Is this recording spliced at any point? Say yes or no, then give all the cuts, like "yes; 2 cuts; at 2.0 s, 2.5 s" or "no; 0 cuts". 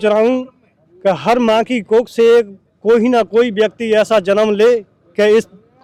no; 0 cuts